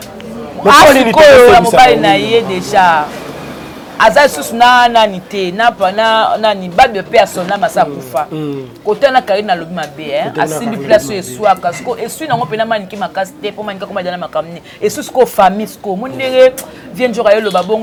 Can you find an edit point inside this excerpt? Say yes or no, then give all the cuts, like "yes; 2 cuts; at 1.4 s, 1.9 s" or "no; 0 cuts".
no; 0 cuts